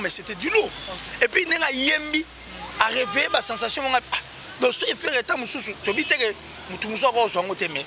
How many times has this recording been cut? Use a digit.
0